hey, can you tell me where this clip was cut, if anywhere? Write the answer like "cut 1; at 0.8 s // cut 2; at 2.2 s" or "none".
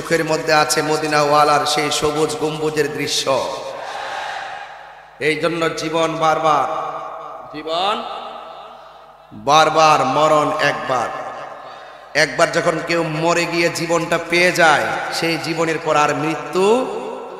none